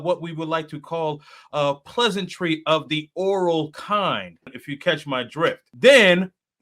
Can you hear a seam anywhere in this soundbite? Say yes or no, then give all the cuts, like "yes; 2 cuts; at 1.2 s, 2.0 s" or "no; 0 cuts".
yes; 2 cuts; at 4.6 s, 5.7 s